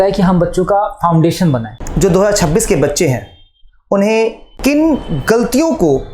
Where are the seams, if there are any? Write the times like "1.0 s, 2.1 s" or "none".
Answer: 1.7 s